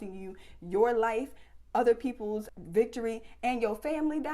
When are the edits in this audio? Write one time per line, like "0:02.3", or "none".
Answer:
0:02.5